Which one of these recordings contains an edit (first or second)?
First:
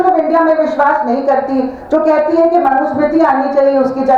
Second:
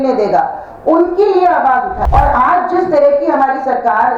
second